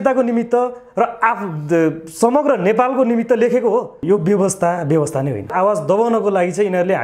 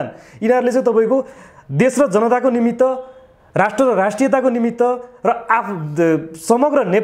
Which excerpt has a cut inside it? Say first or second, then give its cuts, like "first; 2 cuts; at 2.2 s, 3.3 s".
first; 2 cuts; at 4.0 s, 5.5 s